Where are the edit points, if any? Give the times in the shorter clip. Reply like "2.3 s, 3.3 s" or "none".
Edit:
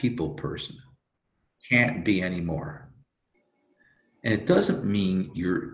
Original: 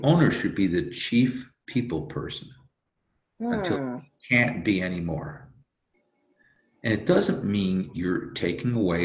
1.5 s